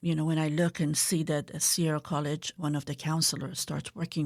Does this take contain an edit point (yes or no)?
no